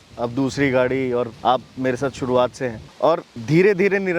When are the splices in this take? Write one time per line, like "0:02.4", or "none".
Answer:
none